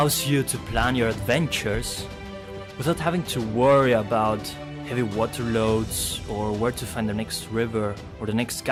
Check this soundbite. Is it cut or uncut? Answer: uncut